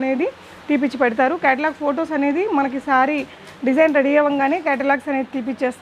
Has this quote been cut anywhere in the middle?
no; 0 cuts

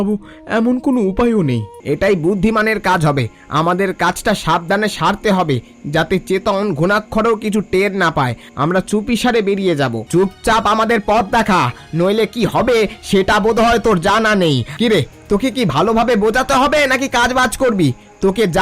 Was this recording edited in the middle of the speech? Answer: yes; 3 cuts; at 1.7 s, 10.0 s, 14.7 s

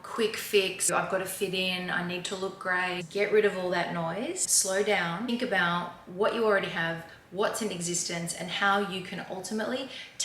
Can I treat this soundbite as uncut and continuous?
no; 4 cuts; at 0.9 s, 3.0 s, 4.5 s, 5.3 s

